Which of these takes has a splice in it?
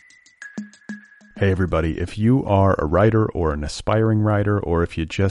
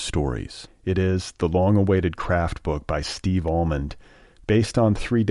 first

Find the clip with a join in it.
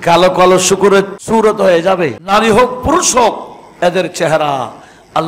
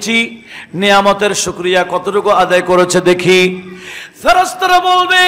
first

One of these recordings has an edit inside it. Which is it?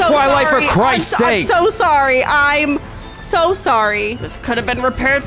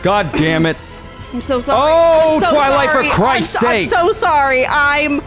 first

